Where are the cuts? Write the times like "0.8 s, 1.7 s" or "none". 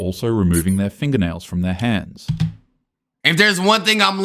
3.2 s